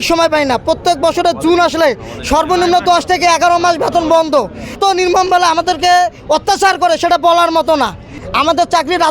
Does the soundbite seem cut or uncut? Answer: cut